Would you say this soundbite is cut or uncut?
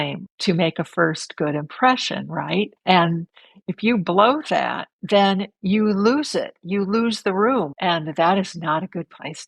uncut